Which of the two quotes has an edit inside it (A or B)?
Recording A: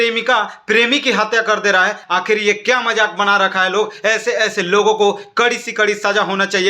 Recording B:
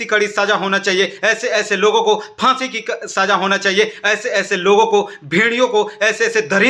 A